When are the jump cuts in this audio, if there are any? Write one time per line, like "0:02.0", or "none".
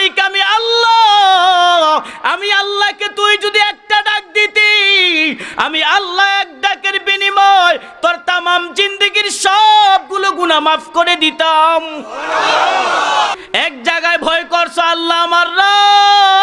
0:13.4